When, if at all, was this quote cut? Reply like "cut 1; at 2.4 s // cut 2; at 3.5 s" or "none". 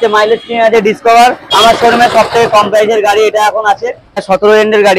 cut 1; at 1.4 s // cut 2; at 4.2 s

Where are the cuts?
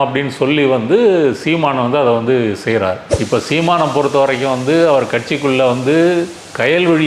cut 1; at 3.1 s

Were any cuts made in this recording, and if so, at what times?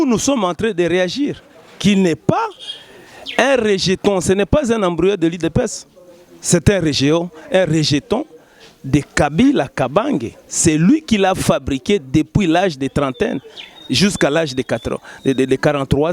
none

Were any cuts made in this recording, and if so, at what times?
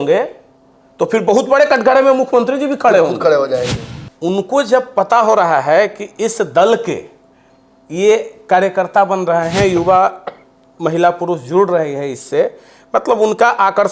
cut 1; at 3.7 s

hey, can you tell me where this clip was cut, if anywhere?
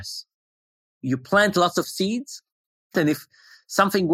cut 1; at 0.7 s // cut 2; at 3.1 s

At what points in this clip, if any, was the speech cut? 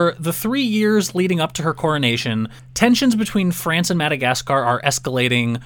cut 1; at 2.6 s

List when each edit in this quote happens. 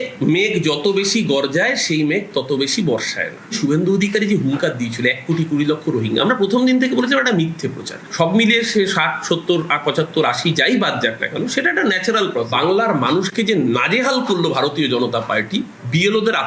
none

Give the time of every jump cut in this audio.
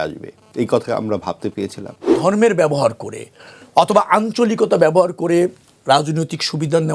cut 1; at 2.2 s

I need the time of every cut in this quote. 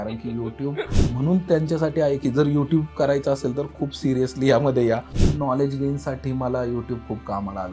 cut 1; at 1.0 s // cut 2; at 5.2 s

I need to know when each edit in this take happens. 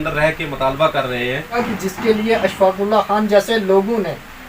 cut 1; at 1.6 s

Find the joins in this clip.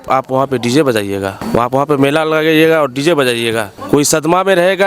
cut 1; at 1.4 s // cut 2; at 3.7 s

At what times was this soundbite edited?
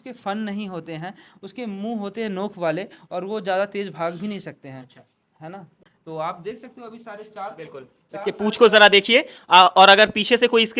cut 1; at 5.7 s

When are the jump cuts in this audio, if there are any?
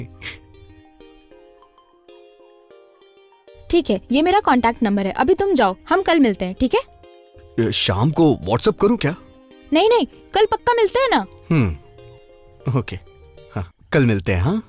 cut 1; at 13.8 s

